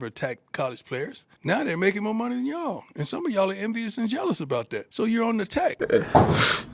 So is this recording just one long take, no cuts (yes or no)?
no